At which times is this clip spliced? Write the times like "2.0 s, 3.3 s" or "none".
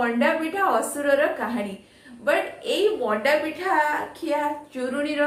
none